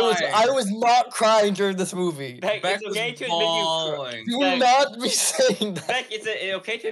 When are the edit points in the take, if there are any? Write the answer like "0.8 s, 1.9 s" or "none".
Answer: none

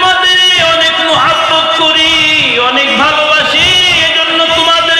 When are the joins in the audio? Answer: none

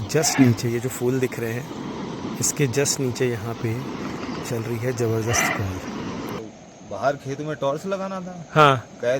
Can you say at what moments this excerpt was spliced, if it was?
6.4 s

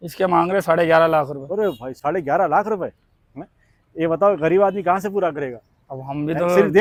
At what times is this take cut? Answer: none

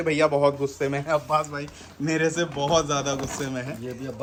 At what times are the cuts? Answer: none

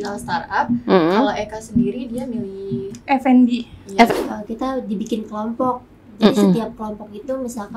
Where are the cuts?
4.1 s

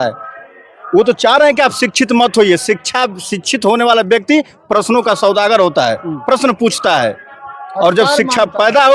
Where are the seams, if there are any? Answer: none

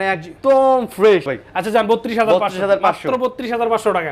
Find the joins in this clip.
1.4 s

